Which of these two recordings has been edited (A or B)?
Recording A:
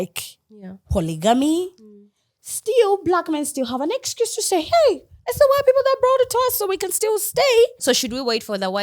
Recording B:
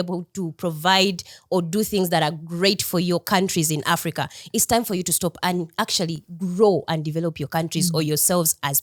A